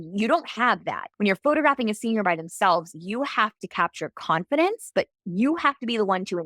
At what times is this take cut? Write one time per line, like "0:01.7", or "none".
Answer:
0:01.0